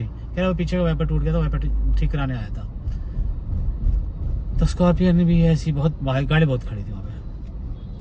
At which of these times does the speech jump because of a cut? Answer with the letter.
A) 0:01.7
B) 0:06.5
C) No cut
C